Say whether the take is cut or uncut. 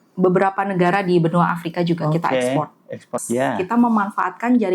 cut